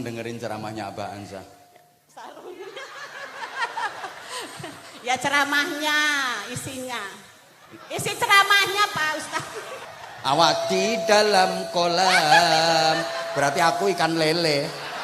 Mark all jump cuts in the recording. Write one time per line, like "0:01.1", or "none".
0:09.9